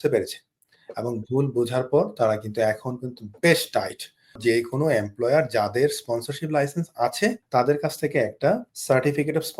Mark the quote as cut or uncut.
cut